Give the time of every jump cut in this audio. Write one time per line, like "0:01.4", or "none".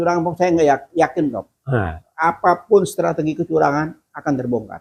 none